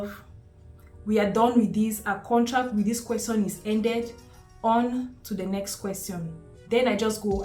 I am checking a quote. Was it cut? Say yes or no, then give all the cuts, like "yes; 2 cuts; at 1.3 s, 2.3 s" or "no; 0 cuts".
no; 0 cuts